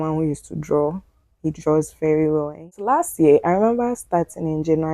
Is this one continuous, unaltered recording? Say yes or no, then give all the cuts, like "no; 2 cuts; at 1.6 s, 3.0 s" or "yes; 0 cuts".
no; 1 cut; at 2.8 s